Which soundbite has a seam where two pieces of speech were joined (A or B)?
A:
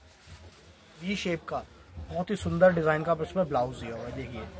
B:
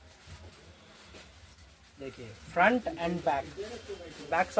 A